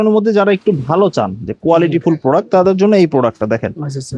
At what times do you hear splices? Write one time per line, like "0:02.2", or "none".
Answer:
none